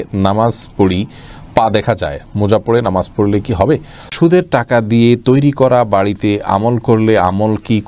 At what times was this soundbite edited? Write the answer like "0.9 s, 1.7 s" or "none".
4.1 s